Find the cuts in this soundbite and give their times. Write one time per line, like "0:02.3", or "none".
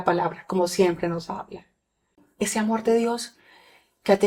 0:02.2